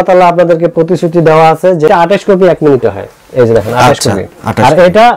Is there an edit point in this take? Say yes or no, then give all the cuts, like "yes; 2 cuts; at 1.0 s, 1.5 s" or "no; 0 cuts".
yes; 1 cut; at 1.9 s